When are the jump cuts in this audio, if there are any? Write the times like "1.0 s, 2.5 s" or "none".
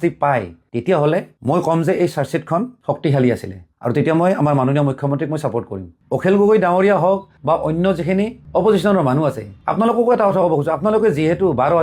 none